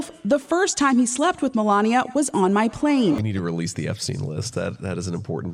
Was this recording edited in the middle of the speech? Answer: yes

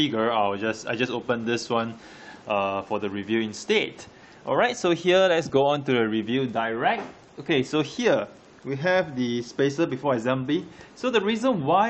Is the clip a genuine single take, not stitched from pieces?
no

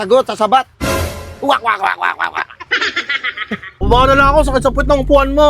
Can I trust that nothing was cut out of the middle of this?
no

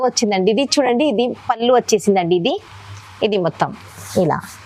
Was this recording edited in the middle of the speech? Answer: no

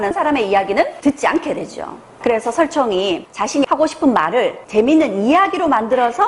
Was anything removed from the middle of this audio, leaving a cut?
yes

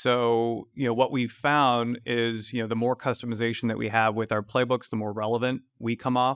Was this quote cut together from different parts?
no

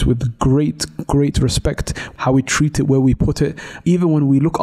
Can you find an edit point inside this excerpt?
yes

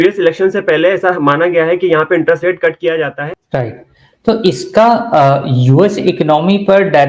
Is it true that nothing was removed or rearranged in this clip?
no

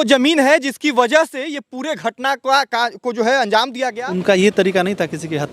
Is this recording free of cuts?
no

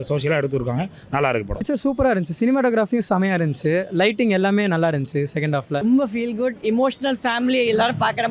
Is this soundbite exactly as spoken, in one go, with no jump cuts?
no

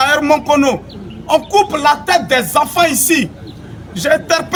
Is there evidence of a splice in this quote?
no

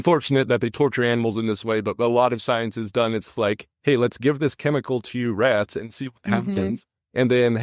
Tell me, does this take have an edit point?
no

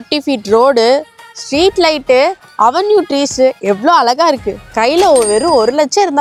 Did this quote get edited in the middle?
yes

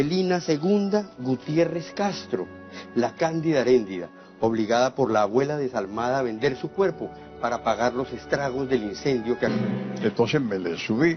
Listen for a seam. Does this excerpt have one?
no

